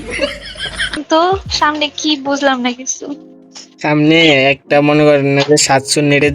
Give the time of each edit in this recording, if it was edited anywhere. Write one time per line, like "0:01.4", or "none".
0:01.0